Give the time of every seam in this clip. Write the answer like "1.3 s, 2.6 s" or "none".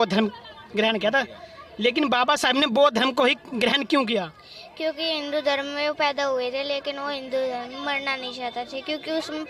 none